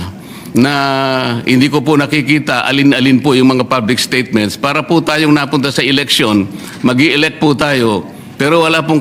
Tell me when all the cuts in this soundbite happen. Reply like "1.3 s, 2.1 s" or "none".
none